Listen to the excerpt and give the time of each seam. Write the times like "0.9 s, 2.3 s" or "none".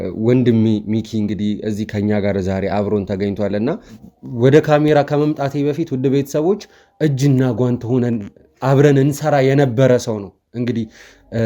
3.9 s